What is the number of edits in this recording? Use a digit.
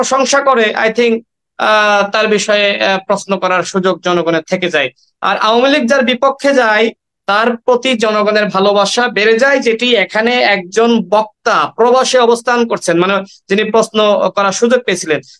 0